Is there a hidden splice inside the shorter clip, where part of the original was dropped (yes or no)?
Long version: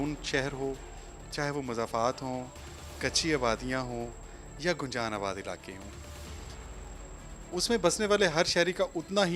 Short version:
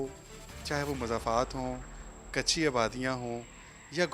no